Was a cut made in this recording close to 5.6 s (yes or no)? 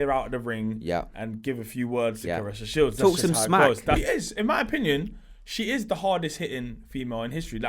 no